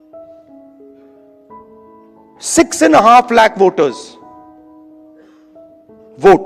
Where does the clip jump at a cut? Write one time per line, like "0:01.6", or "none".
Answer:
0:02.5

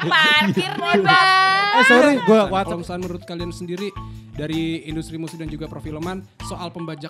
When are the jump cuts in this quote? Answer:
0:02.6

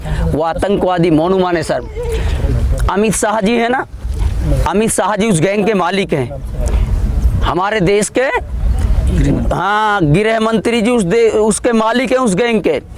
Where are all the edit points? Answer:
none

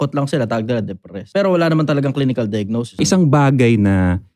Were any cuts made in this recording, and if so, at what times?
0:01.2
0:03.0

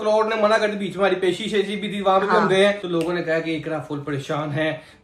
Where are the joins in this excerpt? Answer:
none

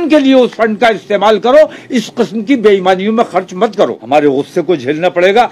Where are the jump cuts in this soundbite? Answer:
0:04.0

